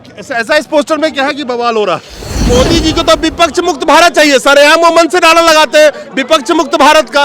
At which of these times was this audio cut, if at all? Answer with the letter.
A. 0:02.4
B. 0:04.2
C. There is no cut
A